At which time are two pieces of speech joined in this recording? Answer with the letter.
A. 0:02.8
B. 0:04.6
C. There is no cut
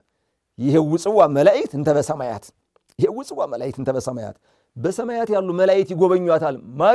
C